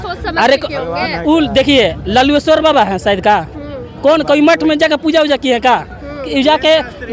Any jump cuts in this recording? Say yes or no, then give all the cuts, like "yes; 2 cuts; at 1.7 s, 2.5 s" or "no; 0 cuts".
no; 0 cuts